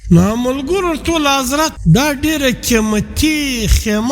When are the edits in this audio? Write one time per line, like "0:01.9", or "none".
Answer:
0:01.8